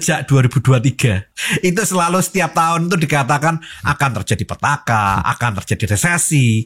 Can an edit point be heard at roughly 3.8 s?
no; 1 cut; at 1.3 s

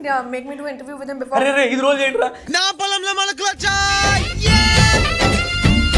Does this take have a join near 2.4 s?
no; 0 cuts

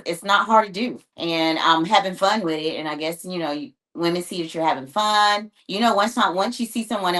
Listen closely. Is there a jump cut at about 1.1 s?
yes; 2 cuts; at 1.1 s, 5.6 s

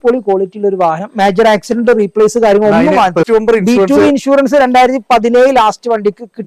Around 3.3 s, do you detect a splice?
yes; 1 cut; at 3.3 s

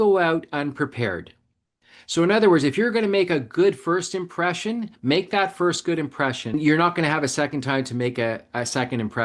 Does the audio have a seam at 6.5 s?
yes; 1 cut; at 6.5 s

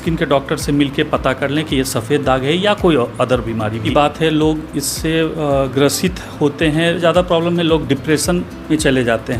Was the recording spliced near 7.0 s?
yes; 2 cuts; at 3.8 s, 7.0 s

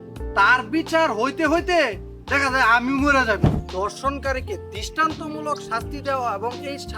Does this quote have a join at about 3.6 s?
yes; 1 cut; at 3.6 s

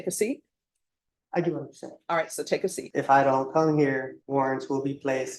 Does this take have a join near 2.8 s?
yes; 2 cuts; at 2.8 s, 4.2 s

